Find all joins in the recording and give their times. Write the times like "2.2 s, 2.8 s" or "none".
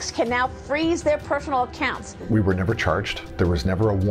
2.1 s, 3.2 s